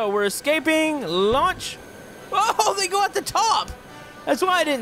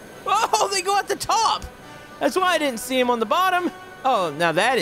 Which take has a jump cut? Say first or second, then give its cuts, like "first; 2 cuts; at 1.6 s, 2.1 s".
second; 1 cut; at 3.9 s